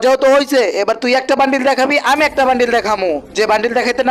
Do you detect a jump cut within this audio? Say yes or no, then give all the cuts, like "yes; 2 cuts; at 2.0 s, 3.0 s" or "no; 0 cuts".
no; 0 cuts